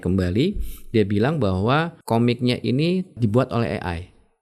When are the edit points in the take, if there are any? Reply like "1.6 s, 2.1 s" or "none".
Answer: 2.0 s, 3.2 s